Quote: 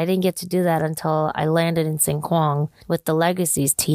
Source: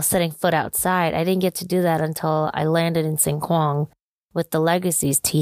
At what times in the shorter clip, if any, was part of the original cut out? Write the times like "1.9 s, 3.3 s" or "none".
2.7 s